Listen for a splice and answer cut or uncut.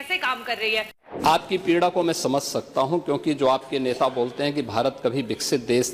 cut